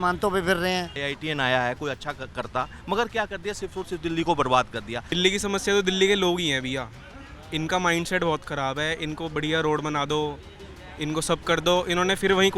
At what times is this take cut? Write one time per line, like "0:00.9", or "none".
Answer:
0:01.0
0:05.1